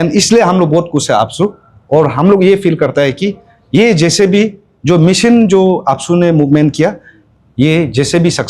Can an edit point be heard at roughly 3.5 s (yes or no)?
no